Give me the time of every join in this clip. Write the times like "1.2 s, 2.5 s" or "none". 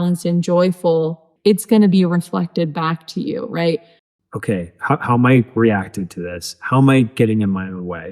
1.2 s, 4.0 s